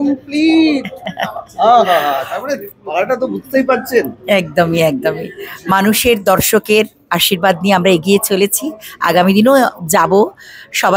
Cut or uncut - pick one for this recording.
uncut